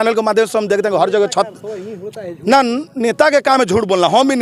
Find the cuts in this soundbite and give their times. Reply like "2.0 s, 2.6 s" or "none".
none